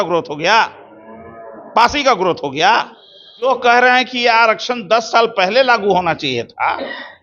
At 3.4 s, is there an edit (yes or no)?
yes